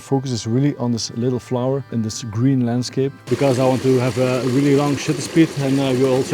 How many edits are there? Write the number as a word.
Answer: two